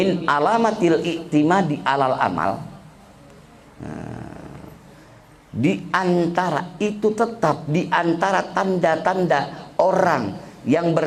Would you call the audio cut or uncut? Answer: uncut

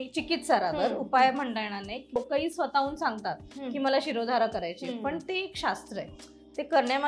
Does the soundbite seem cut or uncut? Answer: cut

